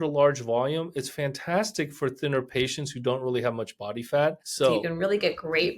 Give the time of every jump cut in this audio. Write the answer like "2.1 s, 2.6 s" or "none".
4.6 s